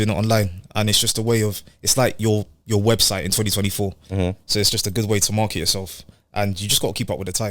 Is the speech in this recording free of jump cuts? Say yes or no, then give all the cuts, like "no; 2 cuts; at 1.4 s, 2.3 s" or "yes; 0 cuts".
yes; 0 cuts